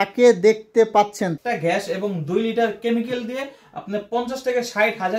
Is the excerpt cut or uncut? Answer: cut